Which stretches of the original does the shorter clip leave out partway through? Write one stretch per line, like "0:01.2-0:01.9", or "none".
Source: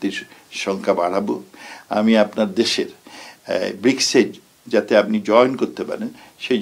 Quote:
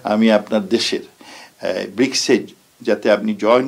none